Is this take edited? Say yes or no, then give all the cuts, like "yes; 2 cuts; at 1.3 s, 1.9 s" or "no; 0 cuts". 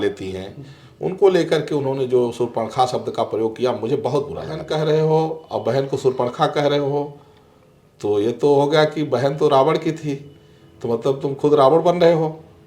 yes; 1 cut; at 4.6 s